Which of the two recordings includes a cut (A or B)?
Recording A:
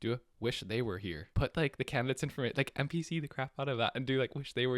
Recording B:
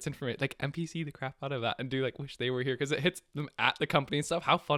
A